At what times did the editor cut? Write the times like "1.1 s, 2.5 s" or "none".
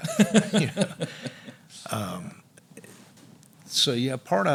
none